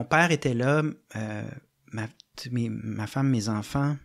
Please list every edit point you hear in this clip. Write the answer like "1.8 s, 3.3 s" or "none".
none